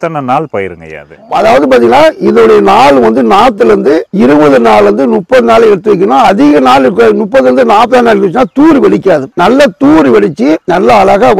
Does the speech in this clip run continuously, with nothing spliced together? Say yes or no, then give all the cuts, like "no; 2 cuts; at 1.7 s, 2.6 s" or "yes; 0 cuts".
no; 1 cut; at 9.3 s